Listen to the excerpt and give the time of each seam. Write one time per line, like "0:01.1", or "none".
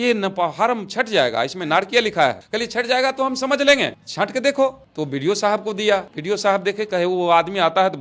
0:06.1